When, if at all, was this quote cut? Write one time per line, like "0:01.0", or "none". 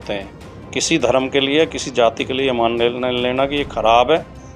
none